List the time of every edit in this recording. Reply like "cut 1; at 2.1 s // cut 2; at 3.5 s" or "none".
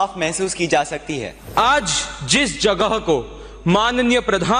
cut 1; at 1.4 s